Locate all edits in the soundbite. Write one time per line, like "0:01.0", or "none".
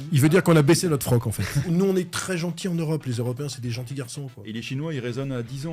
0:01.6
0:04.4